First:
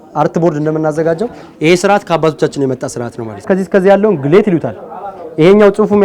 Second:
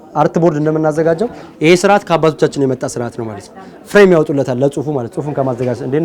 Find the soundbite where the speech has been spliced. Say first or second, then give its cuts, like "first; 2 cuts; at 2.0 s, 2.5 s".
first; 1 cut; at 3.5 s